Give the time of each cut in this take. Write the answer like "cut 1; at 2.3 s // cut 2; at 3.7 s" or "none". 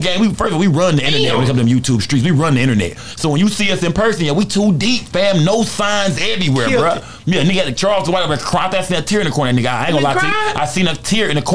none

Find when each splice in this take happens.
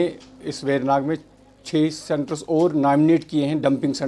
none

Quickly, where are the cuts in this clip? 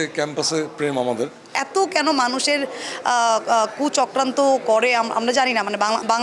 cut 1; at 1.5 s

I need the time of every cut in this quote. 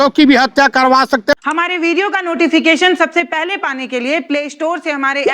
cut 1; at 1.3 s

